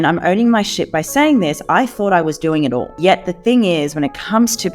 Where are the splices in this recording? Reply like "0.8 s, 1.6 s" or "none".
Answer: 2.9 s